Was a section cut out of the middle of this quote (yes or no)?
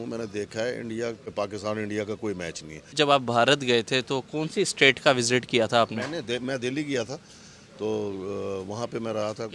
yes